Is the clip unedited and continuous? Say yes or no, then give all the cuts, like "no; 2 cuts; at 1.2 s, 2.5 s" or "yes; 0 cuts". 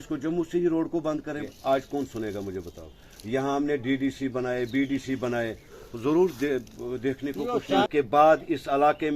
no; 2 cuts; at 1.5 s, 7.9 s